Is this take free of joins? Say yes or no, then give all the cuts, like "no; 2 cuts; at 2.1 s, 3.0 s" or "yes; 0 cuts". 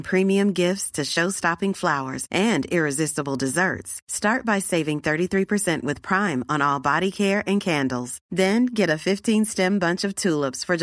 yes; 0 cuts